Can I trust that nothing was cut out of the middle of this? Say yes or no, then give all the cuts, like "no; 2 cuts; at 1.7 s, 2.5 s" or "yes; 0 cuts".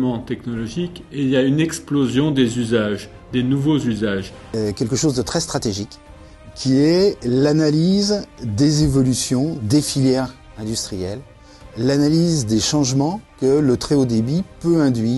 no; 1 cut; at 4.5 s